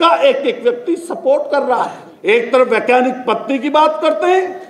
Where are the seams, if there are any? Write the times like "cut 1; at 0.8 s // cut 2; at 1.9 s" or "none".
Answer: cut 1; at 2.0 s

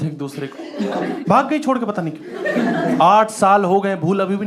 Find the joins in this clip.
cut 1; at 1.2 s

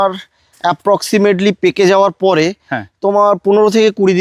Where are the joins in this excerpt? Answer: none

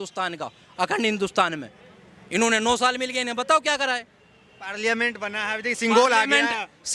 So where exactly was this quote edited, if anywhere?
none

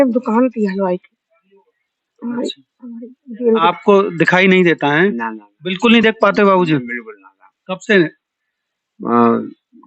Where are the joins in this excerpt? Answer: cut 1; at 3.6 s

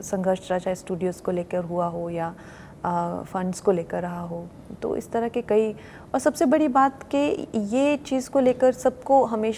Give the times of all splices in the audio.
none

